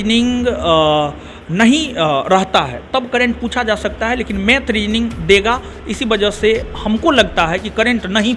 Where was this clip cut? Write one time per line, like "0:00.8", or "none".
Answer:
none